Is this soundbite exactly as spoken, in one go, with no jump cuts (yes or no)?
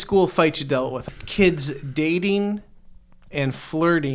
no